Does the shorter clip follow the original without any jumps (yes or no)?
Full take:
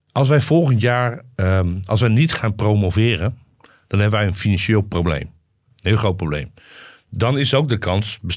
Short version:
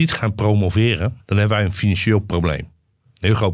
no